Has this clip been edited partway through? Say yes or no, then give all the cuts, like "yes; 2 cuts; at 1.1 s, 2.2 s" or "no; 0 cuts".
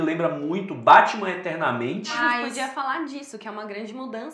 yes; 1 cut; at 2.2 s